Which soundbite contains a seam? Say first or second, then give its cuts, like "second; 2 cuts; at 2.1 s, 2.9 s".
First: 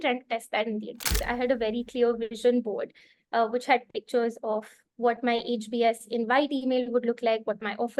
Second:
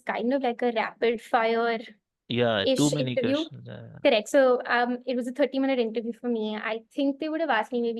first; 1 cut; at 1.3 s